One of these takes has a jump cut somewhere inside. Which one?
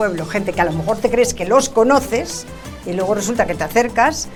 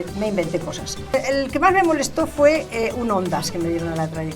second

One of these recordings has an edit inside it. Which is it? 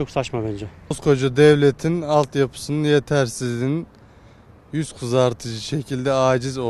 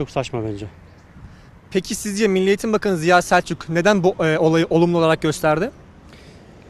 first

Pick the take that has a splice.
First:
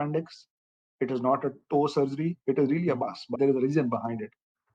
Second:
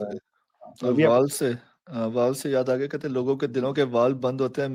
first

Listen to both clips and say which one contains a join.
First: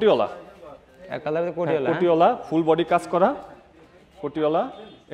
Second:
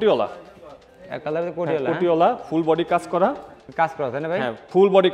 second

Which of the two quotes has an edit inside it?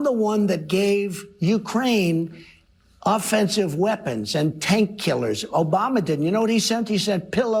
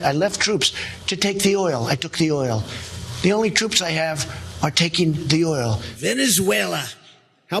second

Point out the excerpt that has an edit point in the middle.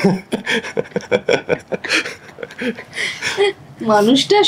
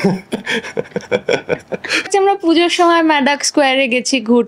second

